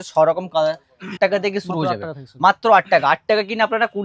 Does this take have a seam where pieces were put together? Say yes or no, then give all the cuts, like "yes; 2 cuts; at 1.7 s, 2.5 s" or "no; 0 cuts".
yes; 1 cut; at 1.1 s